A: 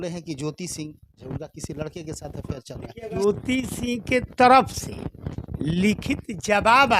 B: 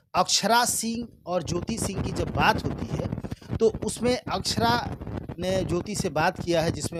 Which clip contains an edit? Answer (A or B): A